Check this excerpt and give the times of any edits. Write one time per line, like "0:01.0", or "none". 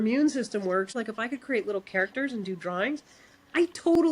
0:00.9